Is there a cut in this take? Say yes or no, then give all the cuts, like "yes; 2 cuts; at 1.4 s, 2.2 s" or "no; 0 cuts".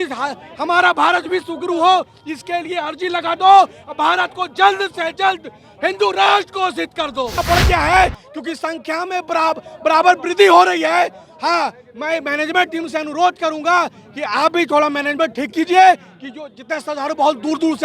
yes; 1 cut; at 7.3 s